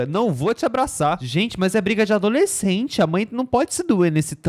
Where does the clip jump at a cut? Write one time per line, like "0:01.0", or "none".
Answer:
none